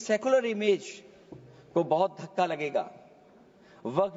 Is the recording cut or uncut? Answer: uncut